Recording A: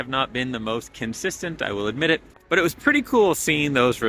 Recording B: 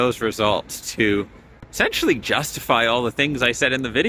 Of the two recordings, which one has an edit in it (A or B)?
A